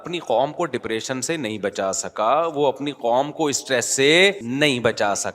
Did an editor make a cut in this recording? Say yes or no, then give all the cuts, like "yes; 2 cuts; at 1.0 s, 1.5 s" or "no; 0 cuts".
yes; 1 cut; at 4.4 s